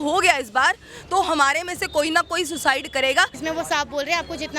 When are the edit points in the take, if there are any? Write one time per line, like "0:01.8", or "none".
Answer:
0:03.4